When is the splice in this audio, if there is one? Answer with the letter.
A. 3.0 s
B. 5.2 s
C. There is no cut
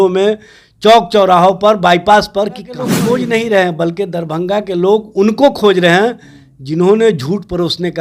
A